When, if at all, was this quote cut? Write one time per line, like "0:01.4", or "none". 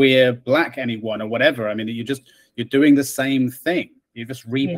none